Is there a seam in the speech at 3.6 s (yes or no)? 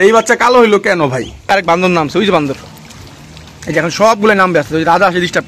no